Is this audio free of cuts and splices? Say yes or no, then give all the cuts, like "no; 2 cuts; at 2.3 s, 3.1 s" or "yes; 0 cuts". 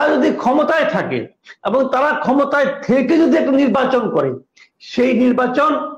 yes; 0 cuts